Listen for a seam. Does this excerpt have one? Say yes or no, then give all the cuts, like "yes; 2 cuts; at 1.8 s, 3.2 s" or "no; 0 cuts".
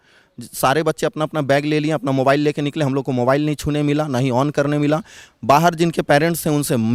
no; 0 cuts